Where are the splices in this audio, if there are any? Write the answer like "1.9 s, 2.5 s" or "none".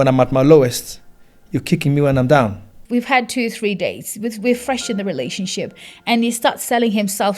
2.7 s